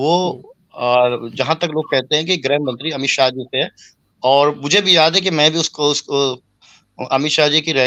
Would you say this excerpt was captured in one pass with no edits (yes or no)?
yes